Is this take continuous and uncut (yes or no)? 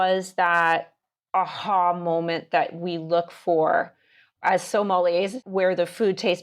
no